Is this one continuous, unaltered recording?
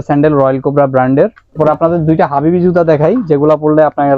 no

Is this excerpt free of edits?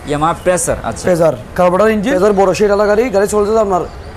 no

